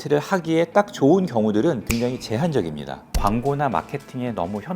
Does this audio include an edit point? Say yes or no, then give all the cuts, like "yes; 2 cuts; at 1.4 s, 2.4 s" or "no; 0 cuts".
yes; 2 cuts; at 1.8 s, 3.0 s